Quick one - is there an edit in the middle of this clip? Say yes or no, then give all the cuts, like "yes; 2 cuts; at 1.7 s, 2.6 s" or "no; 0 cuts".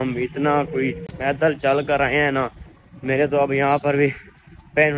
no; 0 cuts